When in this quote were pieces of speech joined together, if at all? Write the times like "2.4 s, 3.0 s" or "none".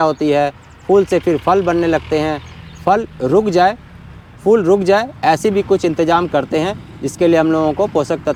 none

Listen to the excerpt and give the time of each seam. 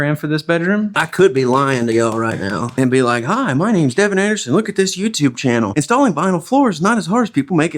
1.0 s

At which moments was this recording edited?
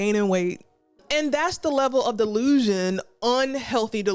1.0 s

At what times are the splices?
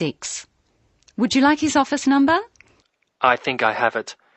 none

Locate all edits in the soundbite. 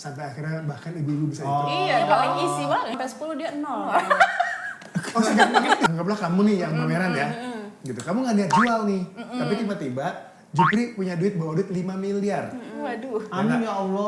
3.0 s, 5.9 s

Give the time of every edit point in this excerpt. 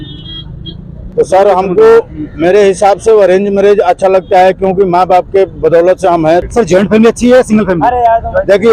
1.0 s, 6.3 s

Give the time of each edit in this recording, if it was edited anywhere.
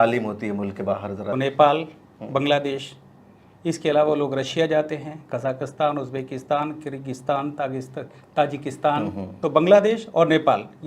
1.3 s, 9.4 s

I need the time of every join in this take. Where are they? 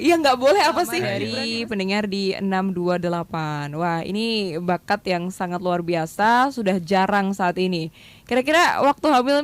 1.2 s

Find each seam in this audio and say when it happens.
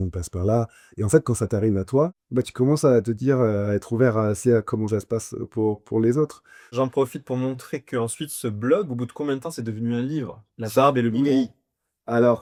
none

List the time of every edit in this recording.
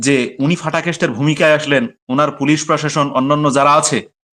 none

